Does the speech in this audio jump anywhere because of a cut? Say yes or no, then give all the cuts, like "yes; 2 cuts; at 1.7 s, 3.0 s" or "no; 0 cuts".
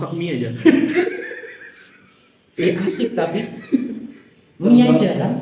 no; 0 cuts